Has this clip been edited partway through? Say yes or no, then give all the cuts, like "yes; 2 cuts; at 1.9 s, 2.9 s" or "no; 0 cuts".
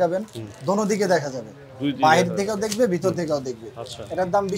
no; 0 cuts